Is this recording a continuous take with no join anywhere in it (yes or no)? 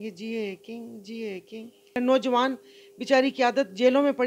no